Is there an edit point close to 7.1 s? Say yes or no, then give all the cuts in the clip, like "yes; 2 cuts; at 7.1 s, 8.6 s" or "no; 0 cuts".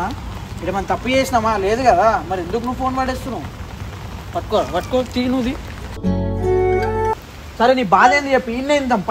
yes; 1 cut; at 7.1 s